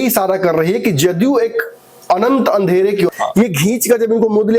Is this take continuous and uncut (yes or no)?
no